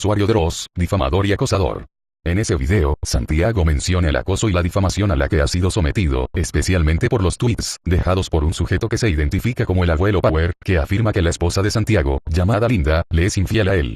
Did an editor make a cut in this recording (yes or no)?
no